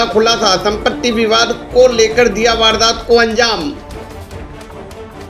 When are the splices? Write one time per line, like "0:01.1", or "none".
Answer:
0:03.8